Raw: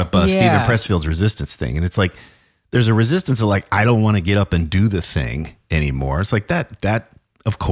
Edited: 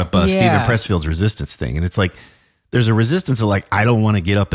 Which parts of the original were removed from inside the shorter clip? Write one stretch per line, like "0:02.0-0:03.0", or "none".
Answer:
none